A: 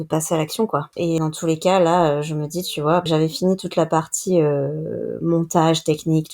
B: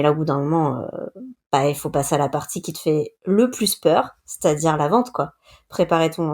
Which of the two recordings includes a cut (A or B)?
A